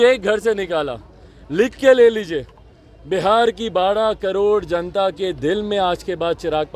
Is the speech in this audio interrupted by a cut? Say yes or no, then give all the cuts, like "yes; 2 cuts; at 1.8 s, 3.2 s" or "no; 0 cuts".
no; 0 cuts